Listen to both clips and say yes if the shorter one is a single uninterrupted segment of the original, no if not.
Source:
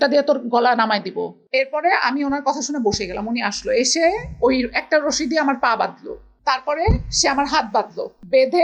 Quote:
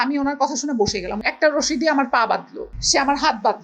no